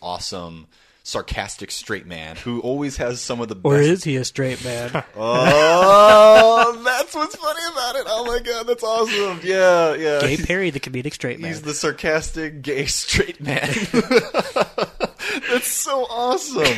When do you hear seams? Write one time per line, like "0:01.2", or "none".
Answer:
none